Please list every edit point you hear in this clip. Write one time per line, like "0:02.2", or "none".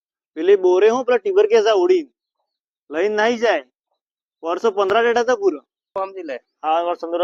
0:05.9